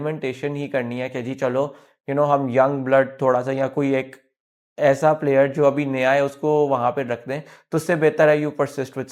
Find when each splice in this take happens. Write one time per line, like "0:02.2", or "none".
none